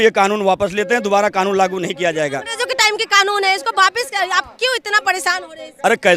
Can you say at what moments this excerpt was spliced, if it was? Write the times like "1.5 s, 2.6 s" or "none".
none